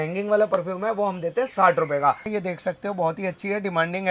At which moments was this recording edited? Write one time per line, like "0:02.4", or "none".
0:02.2